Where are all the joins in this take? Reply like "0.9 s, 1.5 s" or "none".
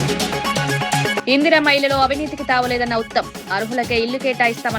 1.2 s